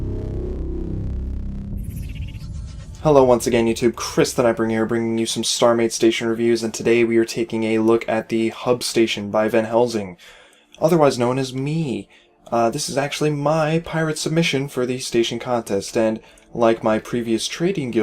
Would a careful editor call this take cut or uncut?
cut